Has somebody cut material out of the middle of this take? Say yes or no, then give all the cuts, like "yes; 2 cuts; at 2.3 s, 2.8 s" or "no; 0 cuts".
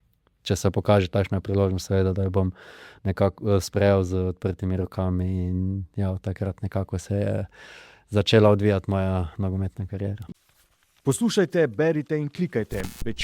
yes; 1 cut; at 10.2 s